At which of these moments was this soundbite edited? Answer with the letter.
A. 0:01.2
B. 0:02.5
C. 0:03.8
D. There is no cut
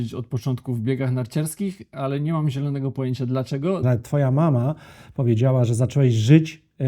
C